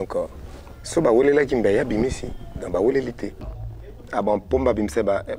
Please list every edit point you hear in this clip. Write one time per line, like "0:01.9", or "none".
0:03.4